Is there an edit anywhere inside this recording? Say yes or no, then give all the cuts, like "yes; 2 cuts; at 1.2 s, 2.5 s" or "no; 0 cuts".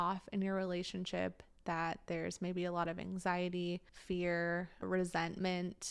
yes; 2 cuts; at 3.9 s, 4.8 s